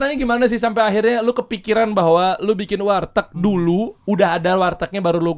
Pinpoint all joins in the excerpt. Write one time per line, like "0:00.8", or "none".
none